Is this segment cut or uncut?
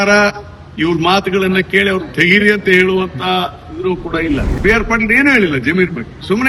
cut